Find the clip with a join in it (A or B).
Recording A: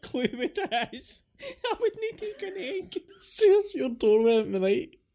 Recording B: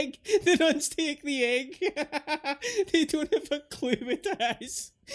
A